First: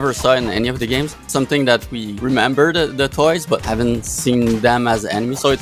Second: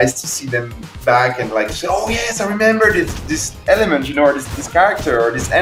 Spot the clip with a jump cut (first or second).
first